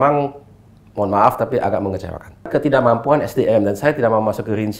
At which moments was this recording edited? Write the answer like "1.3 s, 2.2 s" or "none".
2.5 s